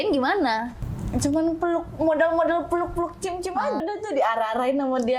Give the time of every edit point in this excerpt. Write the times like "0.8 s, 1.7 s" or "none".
3.8 s